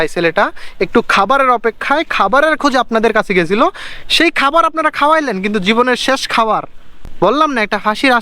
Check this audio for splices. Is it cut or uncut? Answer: cut